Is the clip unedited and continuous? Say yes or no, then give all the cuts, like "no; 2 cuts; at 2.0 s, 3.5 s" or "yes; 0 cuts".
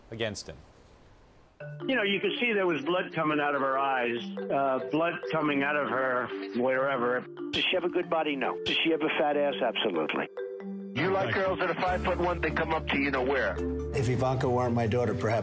no; 1 cut; at 9.9 s